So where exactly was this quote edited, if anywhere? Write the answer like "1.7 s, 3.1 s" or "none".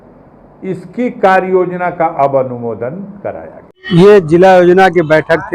3.9 s